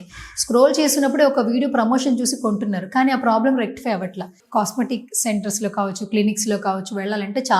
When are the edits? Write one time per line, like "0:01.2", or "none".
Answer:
0:04.4